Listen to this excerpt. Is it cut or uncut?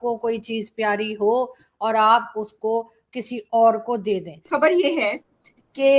cut